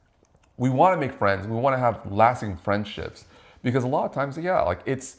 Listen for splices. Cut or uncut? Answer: uncut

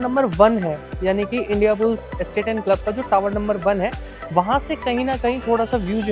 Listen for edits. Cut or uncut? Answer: uncut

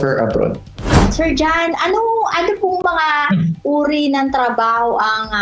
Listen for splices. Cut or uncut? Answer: cut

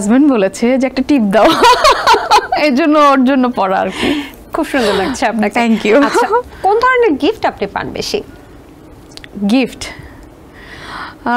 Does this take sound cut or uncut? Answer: uncut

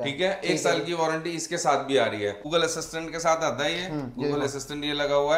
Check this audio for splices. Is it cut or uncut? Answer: cut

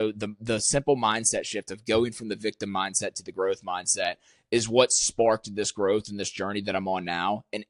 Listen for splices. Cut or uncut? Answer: uncut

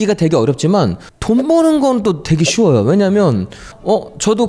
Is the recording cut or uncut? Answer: uncut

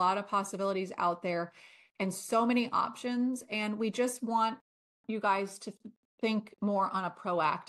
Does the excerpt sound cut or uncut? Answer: uncut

